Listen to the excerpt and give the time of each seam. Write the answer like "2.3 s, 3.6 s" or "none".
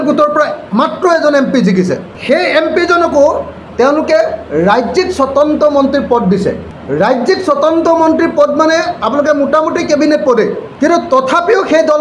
2.1 s, 6.7 s, 10.6 s